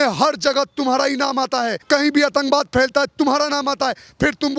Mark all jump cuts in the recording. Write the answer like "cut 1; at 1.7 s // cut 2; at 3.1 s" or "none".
cut 1; at 1.8 s

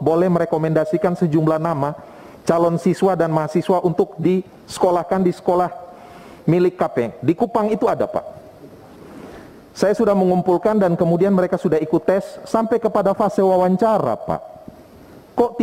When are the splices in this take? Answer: none

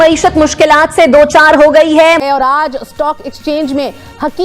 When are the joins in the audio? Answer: cut 1; at 2.2 s

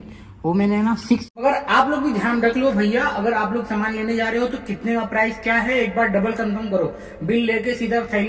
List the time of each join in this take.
cut 1; at 1.3 s

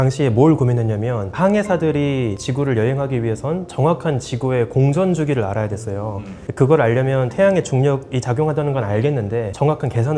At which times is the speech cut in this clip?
none

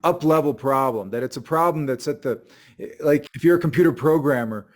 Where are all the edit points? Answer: cut 1; at 3.3 s

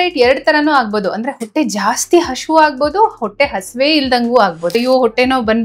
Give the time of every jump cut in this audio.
cut 1; at 4.7 s

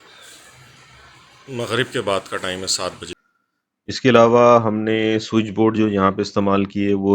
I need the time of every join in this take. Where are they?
cut 1; at 3.1 s

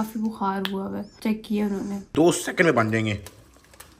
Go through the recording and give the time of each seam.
cut 1; at 2.1 s

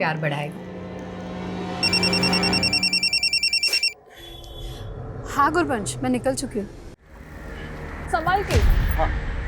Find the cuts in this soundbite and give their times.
cut 1; at 7.1 s

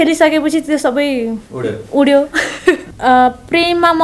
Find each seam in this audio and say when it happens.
cut 1; at 2.9 s

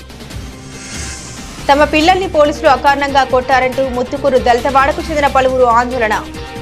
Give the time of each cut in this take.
cut 1; at 0.9 s

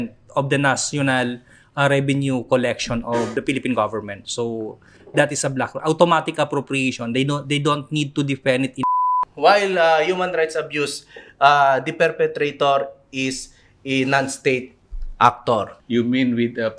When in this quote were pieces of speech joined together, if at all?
cut 1; at 3.3 s // cut 2; at 8.8 s // cut 3; at 15.8 s

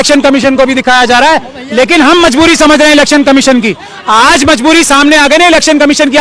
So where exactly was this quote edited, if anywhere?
cut 1; at 1.5 s

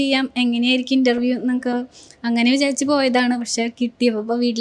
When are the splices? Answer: none

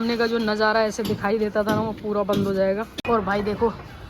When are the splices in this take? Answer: cut 1; at 3.0 s

